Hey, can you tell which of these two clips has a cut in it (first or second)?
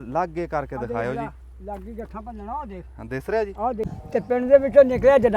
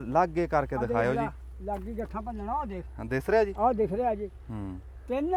first